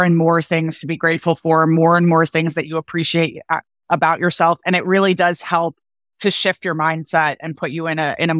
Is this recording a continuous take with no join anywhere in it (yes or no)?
yes